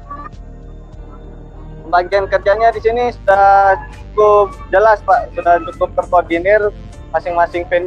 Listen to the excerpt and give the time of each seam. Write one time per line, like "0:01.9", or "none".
none